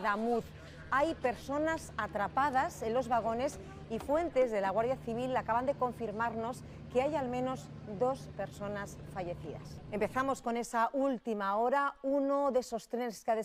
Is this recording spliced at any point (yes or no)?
no